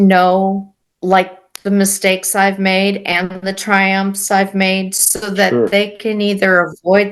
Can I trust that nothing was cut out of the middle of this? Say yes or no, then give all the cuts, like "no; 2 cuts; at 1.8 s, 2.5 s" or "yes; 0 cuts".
yes; 0 cuts